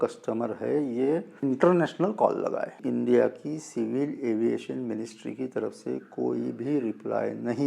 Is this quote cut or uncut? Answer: cut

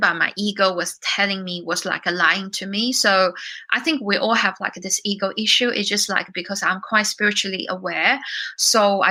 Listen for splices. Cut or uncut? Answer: uncut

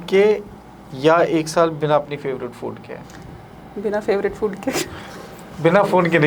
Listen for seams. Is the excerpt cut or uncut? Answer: uncut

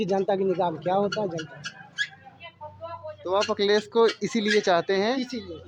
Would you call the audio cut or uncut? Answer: uncut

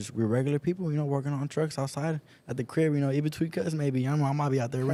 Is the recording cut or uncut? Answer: uncut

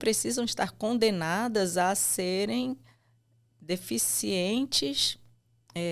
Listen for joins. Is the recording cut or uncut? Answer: uncut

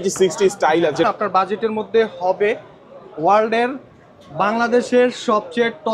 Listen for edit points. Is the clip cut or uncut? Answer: cut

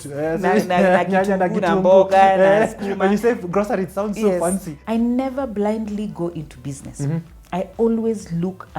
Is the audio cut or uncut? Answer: cut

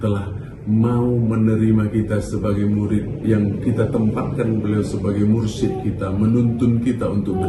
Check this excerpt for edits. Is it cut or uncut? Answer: uncut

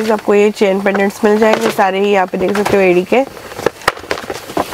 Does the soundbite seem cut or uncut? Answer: uncut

